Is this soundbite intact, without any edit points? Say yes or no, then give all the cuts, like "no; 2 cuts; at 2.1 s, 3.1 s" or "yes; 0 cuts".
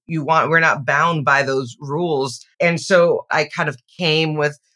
no; 2 cuts; at 2.4 s, 3.3 s